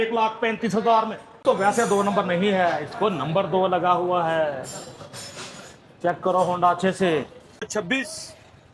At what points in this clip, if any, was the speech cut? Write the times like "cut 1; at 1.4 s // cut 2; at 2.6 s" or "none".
cut 1; at 1.4 s // cut 2; at 7.7 s

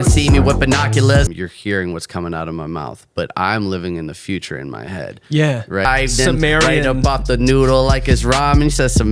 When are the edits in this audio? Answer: cut 1; at 1.3 s // cut 2; at 5.8 s

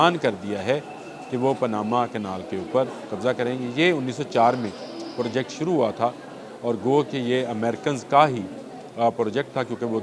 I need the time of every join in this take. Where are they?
none

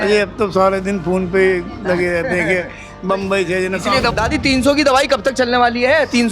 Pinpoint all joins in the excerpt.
cut 1; at 4.1 s

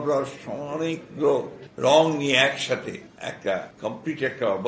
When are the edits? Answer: cut 1; at 1.6 s // cut 2; at 3.1 s // cut 3; at 3.7 s

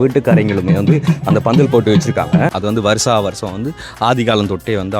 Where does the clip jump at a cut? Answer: cut 1; at 2.6 s

